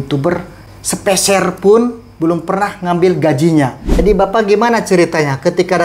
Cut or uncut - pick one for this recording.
cut